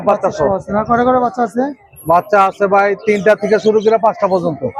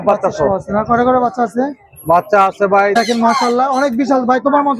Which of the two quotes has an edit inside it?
second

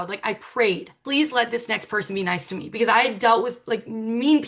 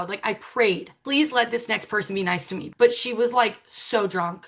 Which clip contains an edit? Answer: second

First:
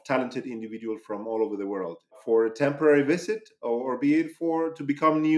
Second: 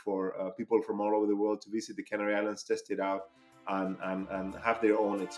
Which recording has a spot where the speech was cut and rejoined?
first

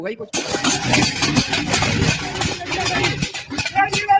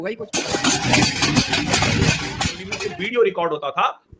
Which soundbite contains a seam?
second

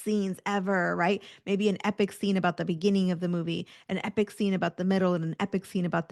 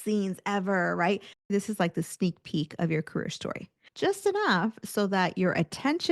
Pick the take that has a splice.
second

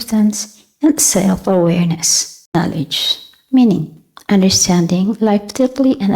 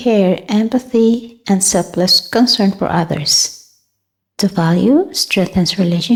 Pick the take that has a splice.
first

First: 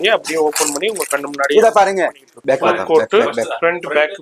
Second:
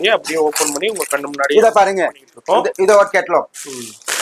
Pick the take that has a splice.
first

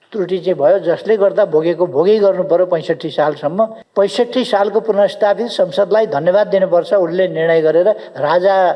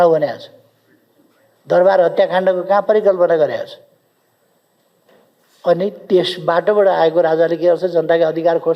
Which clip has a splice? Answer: first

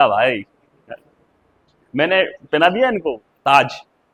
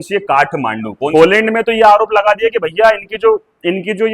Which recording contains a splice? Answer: second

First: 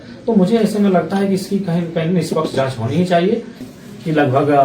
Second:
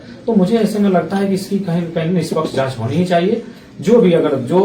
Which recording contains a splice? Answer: first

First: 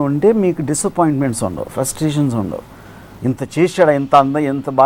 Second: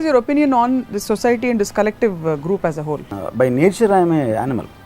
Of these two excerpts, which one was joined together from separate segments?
second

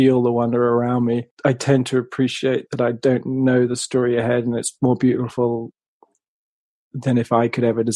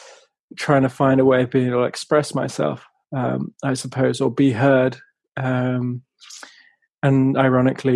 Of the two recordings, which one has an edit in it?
first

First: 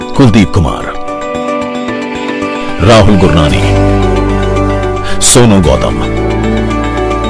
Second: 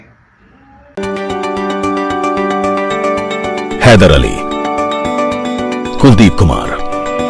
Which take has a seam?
second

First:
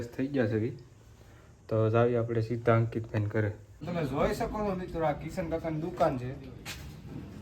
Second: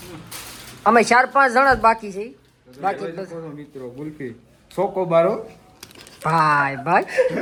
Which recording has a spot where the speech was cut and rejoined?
first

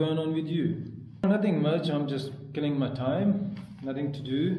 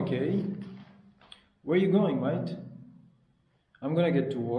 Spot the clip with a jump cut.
first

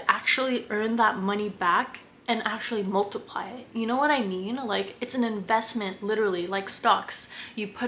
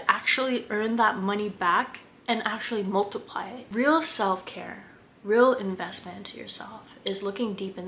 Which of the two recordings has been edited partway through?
second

